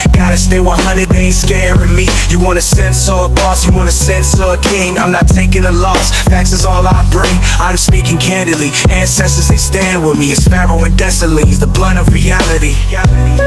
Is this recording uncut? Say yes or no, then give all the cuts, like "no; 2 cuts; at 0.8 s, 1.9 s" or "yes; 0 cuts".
yes; 0 cuts